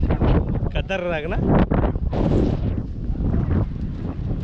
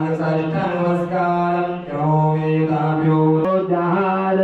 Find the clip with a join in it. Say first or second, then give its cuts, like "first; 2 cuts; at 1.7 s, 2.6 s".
second; 1 cut; at 3.5 s